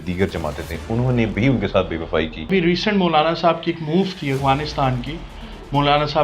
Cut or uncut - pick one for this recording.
cut